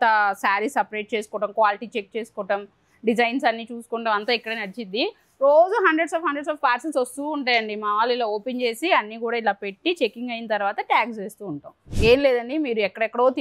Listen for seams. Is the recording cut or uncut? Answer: cut